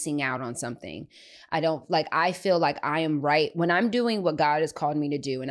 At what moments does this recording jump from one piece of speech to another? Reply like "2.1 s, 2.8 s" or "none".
none

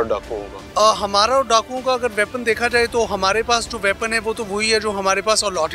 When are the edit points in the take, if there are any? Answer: none

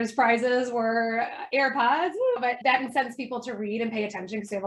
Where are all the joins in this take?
none

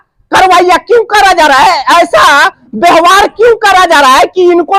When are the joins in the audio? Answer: none

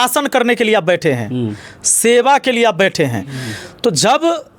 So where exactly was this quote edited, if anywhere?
none

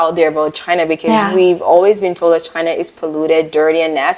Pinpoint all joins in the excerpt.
none

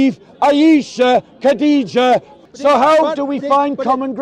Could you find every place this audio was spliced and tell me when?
2.3 s

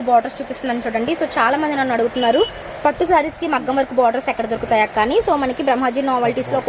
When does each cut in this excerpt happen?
none

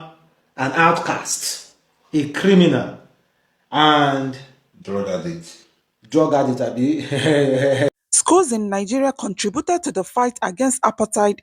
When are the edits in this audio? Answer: 7.9 s

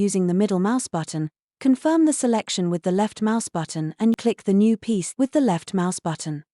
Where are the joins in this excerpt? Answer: 4.1 s, 5.1 s

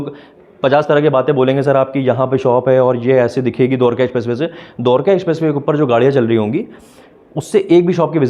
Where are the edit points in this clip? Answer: none

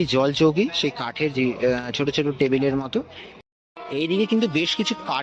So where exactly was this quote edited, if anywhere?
3.4 s

